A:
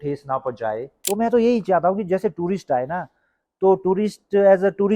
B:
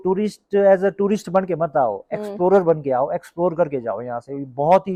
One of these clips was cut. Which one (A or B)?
A